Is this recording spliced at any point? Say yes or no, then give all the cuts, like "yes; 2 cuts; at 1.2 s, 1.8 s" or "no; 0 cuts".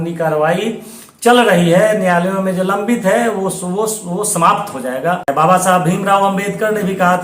yes; 1 cut; at 5.3 s